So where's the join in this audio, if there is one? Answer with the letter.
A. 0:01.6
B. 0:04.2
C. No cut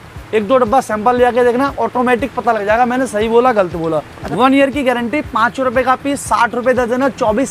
B